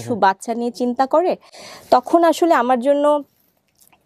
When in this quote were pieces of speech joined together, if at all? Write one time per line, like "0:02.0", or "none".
none